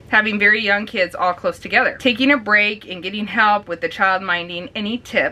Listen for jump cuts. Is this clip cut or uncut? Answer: uncut